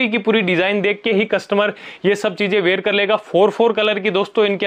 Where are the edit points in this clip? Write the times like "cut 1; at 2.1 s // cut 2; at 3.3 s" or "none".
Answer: none